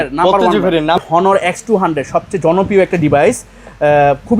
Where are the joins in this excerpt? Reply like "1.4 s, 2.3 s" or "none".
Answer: 1.0 s